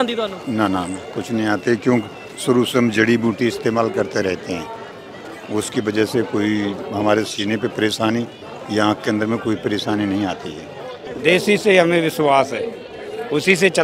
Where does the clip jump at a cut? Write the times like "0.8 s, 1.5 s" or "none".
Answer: 11.0 s